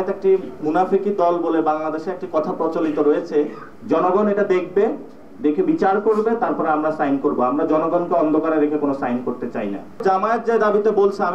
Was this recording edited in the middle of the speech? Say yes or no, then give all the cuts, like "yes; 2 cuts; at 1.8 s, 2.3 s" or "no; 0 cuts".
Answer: yes; 2 cuts; at 3.7 s, 9.9 s